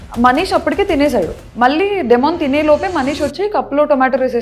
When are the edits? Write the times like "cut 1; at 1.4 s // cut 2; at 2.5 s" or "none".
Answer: cut 1; at 1.4 s